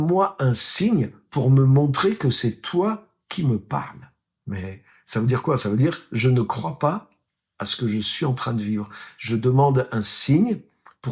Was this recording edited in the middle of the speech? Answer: yes; 1 cut; at 4.3 s

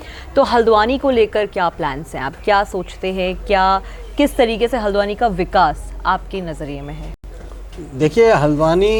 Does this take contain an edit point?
no; 0 cuts

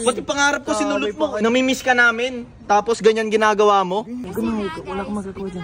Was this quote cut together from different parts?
yes; 2 cuts; at 1.3 s, 4.2 s

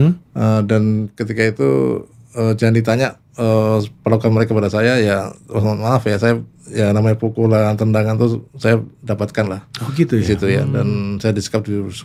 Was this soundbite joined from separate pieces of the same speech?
no; 0 cuts

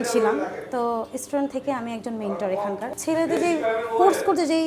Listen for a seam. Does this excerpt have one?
yes; 1 cut; at 2.9 s

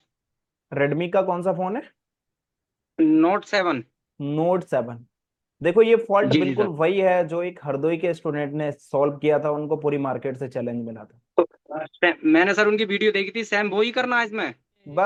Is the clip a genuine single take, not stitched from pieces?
yes; 0 cuts

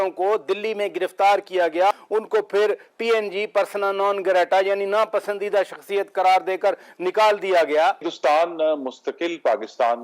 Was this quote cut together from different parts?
yes; 2 cuts; at 2.0 s, 8.1 s

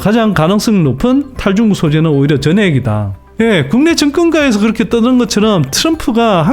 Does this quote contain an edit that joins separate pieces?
yes; 1 cut; at 3.2 s

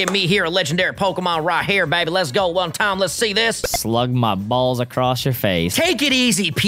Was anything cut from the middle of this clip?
yes; 2 cuts; at 3.7 s, 5.7 s

